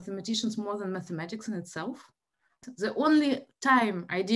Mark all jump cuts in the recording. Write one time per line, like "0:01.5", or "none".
0:02.6